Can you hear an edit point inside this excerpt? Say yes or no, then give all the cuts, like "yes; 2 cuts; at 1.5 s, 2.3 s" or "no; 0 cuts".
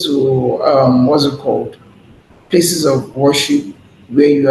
no; 0 cuts